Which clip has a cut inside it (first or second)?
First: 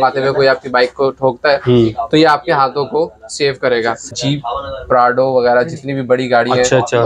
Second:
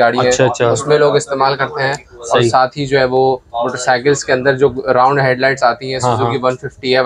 first